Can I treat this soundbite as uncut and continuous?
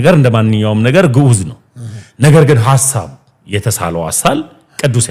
yes; 0 cuts

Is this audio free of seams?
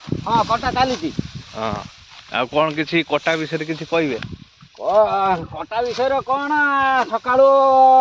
yes; 0 cuts

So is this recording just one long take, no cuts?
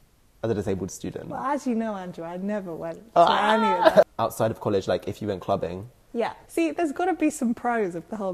no; 2 cuts; at 4.0 s, 6.4 s

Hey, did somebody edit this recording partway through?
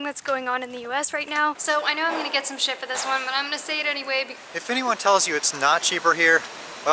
yes; 2 cuts; at 1.6 s, 4.3 s

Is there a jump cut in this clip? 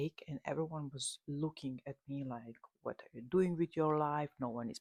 no; 0 cuts

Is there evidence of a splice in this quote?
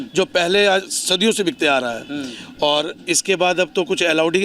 no; 0 cuts

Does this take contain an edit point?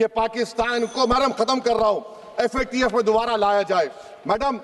no; 0 cuts

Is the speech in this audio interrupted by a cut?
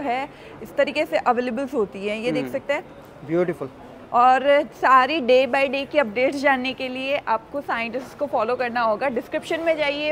no; 0 cuts

